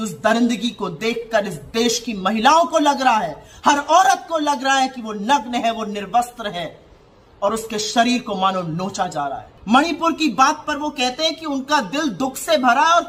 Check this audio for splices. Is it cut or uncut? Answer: cut